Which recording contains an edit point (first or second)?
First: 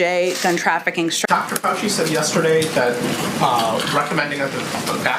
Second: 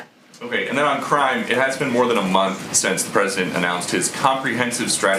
first